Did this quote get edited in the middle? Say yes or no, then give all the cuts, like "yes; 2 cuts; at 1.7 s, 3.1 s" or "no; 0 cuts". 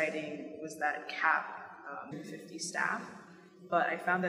no; 0 cuts